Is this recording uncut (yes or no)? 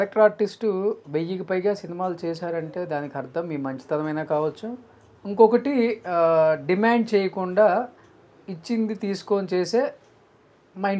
yes